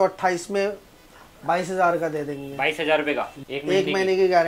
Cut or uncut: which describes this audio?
cut